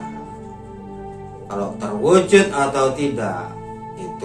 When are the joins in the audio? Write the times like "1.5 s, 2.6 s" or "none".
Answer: 1.5 s